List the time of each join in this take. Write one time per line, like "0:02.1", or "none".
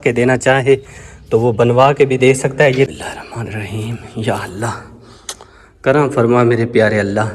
0:03.0